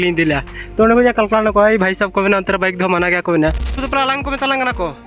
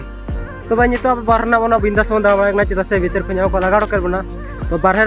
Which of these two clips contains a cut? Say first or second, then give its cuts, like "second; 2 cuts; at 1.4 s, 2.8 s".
first; 1 cut; at 3.8 s